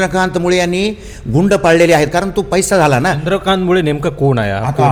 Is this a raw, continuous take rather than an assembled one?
yes; 0 cuts

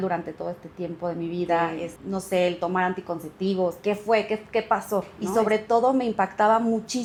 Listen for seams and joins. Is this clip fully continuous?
yes; 0 cuts

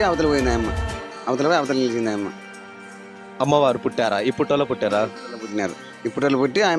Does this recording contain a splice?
no; 0 cuts

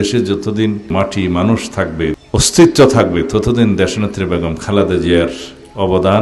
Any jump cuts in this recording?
yes; 2 cuts; at 0.9 s, 2.1 s

